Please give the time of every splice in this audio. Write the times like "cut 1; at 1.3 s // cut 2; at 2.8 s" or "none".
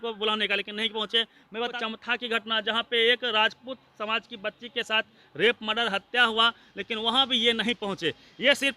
cut 1; at 1.7 s